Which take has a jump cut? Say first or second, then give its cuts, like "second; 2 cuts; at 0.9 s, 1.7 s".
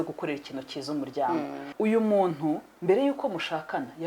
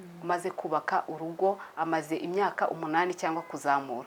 first; 1 cut; at 1.6 s